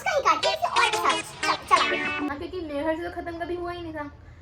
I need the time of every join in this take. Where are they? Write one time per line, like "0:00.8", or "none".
0:02.3